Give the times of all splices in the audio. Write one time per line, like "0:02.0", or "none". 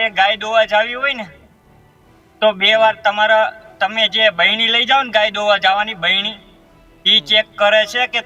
none